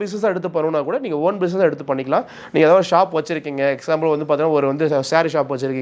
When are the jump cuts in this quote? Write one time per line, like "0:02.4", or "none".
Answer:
none